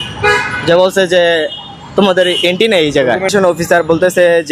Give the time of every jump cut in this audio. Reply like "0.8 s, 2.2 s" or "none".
3.3 s